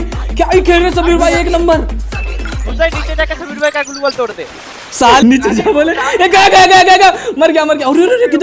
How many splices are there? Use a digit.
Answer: 1